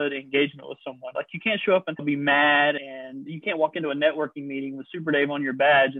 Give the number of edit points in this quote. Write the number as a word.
two